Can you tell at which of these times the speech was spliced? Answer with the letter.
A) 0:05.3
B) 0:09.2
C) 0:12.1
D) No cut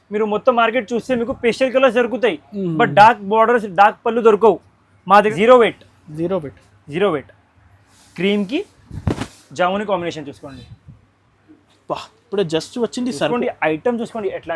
A